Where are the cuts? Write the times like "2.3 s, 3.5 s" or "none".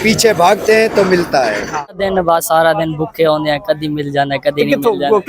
2.0 s